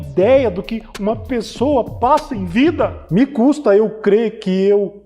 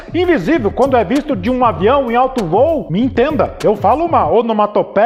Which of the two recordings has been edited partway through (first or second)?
first